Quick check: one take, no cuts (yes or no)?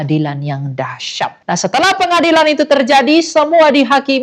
no